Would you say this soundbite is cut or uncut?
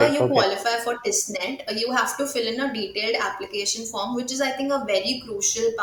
uncut